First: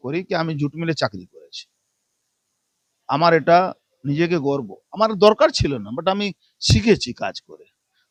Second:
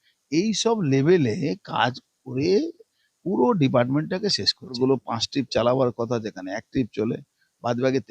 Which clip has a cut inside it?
second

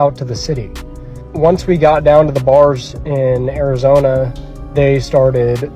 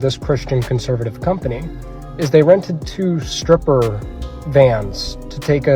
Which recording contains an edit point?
first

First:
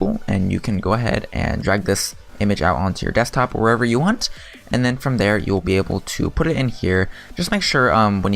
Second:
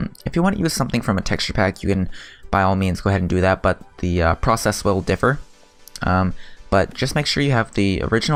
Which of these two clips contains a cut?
first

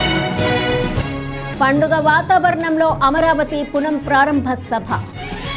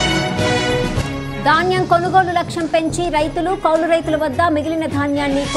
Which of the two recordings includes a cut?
second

